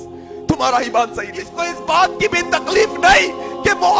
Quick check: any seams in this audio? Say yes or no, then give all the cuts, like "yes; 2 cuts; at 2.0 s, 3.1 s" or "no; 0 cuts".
yes; 1 cut; at 1.6 s